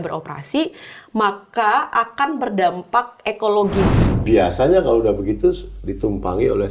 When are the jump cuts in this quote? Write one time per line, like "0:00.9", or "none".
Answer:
0:04.0